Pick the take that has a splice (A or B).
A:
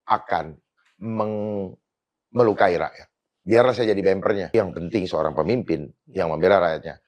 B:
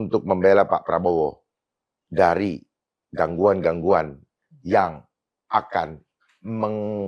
A